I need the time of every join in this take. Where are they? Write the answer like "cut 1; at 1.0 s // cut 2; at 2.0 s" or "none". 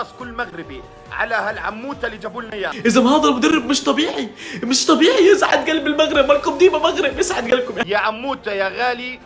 cut 1; at 2.7 s // cut 2; at 7.8 s